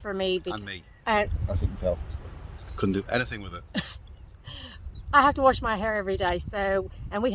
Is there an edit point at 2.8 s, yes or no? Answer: no